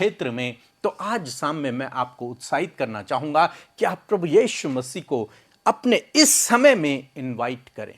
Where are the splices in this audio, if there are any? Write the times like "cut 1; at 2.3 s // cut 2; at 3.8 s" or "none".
none